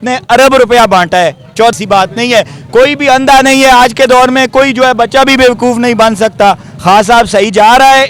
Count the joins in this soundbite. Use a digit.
1